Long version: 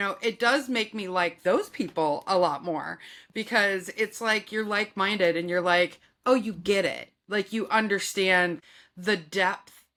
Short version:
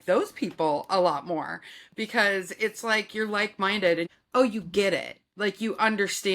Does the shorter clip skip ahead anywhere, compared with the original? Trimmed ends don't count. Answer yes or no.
yes